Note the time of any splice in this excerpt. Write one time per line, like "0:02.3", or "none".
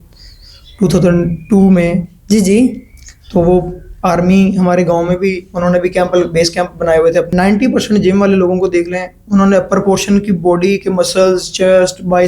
0:07.3

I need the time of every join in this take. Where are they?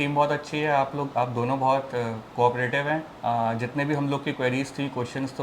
0:03.1

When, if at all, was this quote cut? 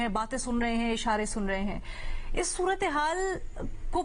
none

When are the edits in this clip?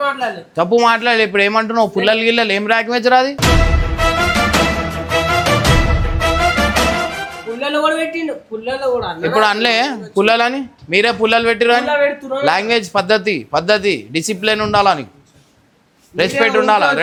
none

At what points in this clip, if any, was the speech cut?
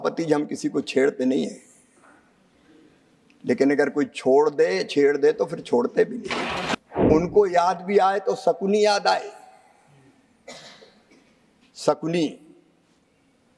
0:06.7

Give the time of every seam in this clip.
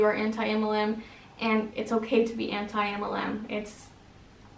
none

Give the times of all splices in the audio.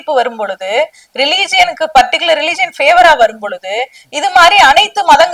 none

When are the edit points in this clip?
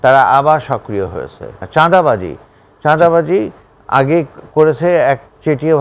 0:01.6

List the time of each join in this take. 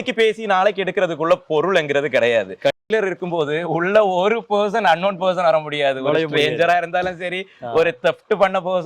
0:02.8

